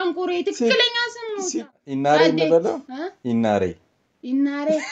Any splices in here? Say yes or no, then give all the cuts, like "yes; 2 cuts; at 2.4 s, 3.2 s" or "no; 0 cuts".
yes; 1 cut; at 1.4 s